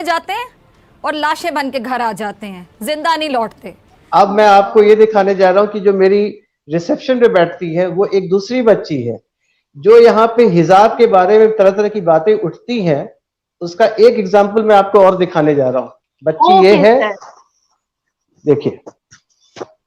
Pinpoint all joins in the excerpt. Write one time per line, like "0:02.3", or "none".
none